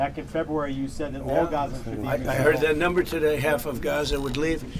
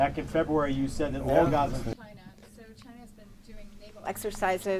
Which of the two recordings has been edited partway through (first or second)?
second